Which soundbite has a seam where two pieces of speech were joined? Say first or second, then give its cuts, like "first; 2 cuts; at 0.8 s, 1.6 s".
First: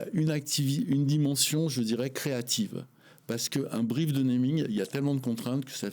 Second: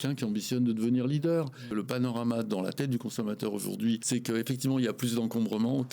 second; 2 cuts; at 1.6 s, 4.0 s